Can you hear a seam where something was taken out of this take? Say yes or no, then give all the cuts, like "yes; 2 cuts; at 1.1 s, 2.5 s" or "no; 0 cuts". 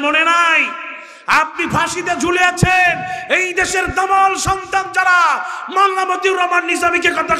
no; 0 cuts